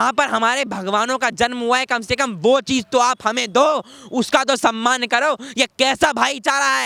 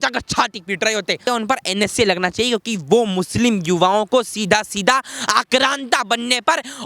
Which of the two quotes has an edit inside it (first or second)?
second